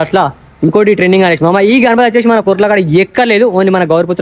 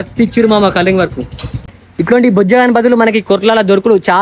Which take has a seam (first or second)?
second